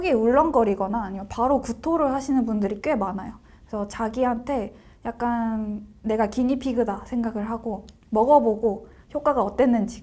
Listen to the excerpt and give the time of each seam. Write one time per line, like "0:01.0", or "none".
none

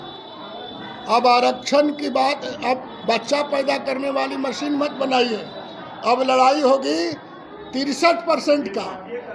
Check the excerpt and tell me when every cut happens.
none

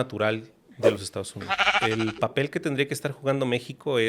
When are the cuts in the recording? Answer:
0:01.7

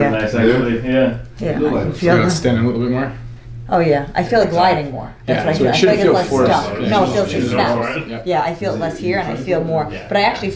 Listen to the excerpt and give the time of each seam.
none

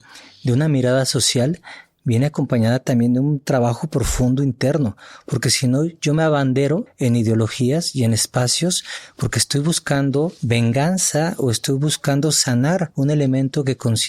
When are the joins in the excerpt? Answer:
0:06.9
0:10.4
0:12.9

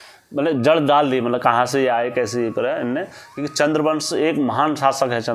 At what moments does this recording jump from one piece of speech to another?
none

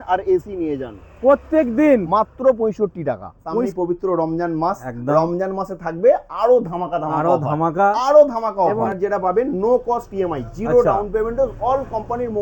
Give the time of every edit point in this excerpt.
0:03.7
0:08.9

